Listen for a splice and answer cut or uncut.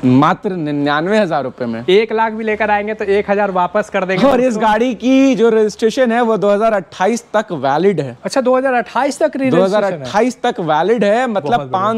uncut